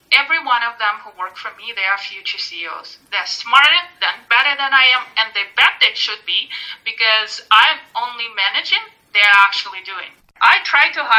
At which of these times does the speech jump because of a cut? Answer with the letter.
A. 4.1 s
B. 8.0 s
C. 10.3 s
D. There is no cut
C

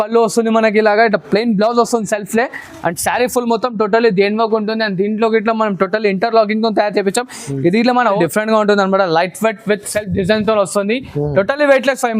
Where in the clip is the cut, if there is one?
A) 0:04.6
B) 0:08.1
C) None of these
B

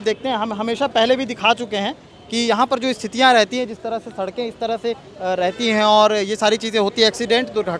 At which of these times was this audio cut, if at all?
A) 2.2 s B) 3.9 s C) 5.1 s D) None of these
D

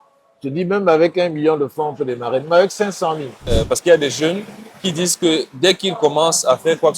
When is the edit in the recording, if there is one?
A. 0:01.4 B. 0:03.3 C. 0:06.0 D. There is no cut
B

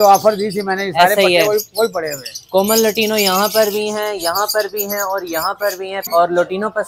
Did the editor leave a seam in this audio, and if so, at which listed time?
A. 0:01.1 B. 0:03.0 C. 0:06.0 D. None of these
C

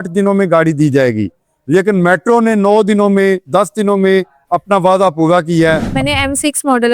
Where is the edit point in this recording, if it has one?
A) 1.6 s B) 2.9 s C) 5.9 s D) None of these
C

